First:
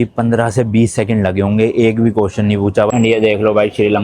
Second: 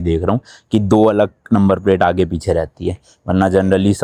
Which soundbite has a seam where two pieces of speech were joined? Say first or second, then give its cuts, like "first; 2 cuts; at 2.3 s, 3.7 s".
first; 1 cut; at 2.9 s